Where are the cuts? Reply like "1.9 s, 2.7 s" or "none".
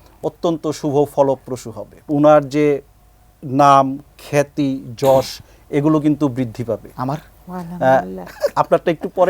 2.1 s